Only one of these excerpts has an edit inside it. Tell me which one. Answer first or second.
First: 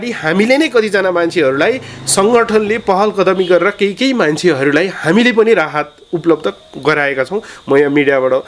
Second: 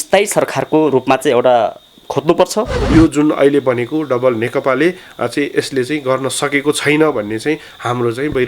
second